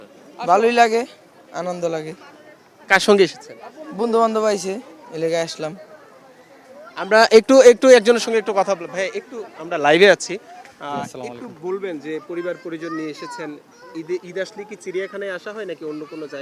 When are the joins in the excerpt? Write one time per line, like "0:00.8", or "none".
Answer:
none